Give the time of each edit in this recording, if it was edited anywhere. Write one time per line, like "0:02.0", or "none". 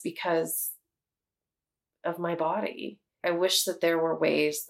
0:03.1